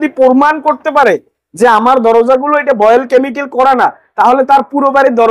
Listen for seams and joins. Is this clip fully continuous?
yes; 0 cuts

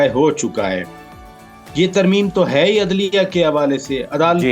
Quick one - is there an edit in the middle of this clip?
no; 0 cuts

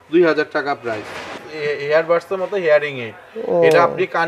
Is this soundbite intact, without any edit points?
no; 1 cut; at 1.3 s

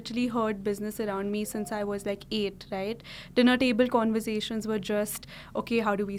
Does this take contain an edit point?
no; 0 cuts

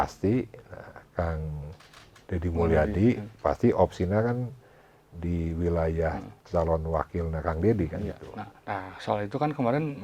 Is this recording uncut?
yes; 0 cuts

